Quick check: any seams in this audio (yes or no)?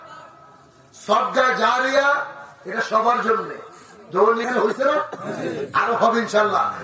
yes